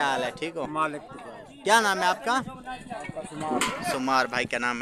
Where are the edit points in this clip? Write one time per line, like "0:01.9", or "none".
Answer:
none